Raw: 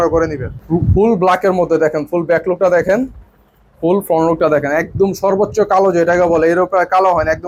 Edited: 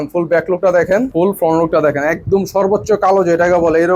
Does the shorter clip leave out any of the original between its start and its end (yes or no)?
yes